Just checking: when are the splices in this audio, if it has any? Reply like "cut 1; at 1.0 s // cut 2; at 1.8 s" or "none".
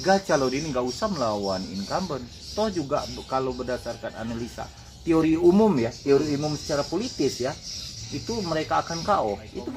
none

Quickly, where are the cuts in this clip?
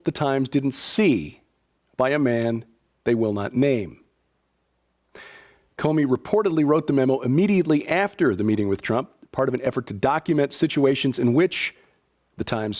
cut 1; at 8.0 s

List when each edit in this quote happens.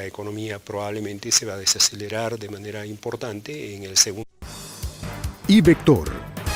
none

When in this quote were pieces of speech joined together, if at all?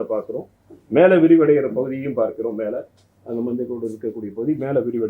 none

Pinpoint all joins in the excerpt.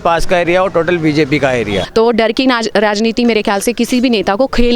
cut 1; at 1.8 s

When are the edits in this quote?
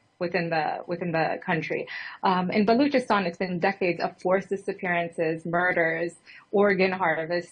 none

